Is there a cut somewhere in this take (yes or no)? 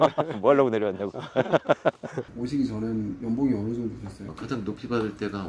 yes